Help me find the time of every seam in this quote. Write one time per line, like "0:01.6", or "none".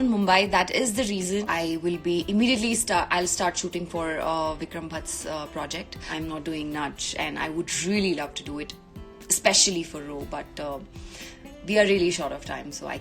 0:01.4
0:06.1